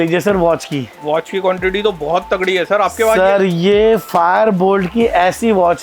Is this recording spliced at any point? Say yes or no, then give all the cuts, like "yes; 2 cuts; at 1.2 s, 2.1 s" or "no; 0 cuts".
no; 0 cuts